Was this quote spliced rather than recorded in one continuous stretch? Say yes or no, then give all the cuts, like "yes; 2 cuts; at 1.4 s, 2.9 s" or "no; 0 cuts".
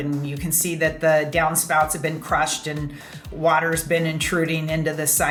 no; 0 cuts